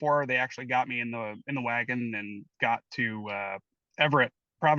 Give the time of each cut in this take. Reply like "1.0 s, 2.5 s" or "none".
none